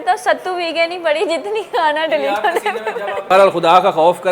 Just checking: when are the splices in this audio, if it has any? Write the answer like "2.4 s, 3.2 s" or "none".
3.2 s